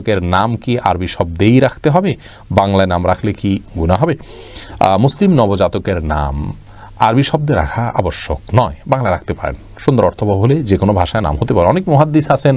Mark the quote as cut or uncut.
uncut